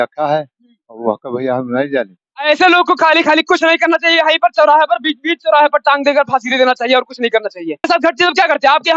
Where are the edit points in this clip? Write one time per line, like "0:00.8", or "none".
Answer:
0:07.8